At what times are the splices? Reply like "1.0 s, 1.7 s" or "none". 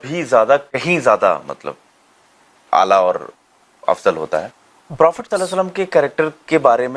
none